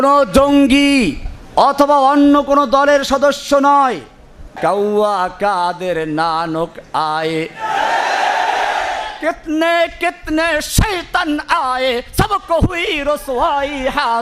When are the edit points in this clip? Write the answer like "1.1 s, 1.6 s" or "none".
4.4 s